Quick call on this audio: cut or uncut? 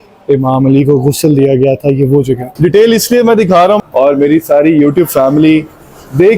cut